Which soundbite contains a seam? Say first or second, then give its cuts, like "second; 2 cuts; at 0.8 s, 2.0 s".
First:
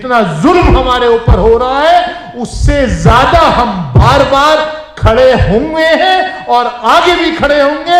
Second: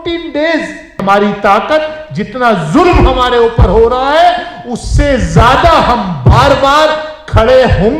second; 1 cut; at 1.0 s